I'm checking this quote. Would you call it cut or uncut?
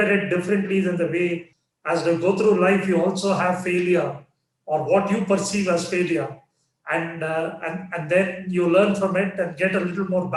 cut